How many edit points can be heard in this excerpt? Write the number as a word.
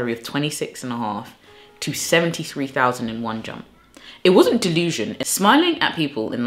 one